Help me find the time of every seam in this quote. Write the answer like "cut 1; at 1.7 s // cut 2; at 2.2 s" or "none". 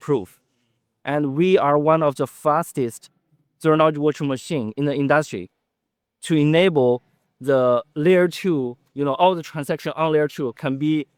none